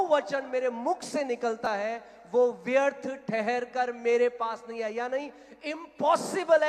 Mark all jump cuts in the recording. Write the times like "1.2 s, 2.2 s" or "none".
none